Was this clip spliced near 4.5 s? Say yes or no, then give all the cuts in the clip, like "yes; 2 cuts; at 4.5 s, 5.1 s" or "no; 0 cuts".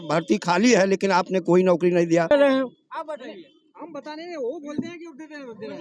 no; 1 cut; at 2.3 s